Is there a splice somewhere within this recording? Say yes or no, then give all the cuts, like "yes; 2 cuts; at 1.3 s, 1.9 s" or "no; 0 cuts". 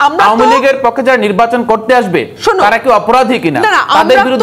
no; 0 cuts